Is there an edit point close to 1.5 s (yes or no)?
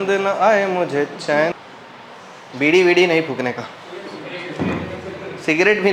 yes